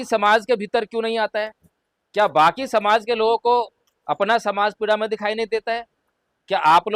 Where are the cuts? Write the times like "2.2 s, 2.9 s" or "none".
none